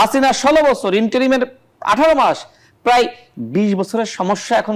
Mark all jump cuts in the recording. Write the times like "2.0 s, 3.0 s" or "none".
none